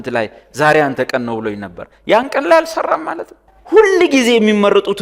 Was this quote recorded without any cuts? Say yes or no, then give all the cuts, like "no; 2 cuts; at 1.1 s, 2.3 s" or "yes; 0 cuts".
no; 1 cut; at 3.5 s